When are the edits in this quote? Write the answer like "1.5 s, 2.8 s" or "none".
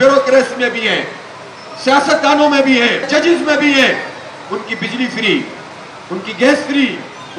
3.1 s